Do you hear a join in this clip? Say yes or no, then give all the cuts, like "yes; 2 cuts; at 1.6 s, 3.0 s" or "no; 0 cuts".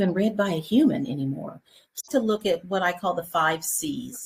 yes; 1 cut; at 2.0 s